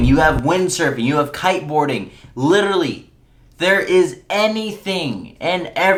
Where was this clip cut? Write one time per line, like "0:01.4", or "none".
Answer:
none